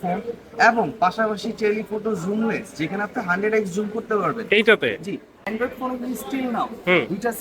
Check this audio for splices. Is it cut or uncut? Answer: cut